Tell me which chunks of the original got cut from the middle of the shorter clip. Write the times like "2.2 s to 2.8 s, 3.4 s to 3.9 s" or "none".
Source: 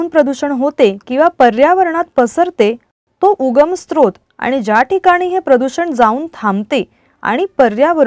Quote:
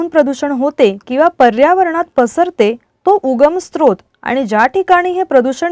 2.9 s to 3.0 s